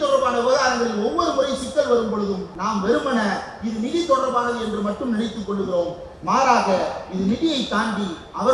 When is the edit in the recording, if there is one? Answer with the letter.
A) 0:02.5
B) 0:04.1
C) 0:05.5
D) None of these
A